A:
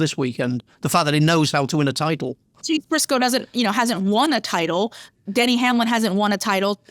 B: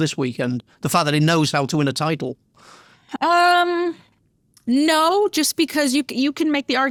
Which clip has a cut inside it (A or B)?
A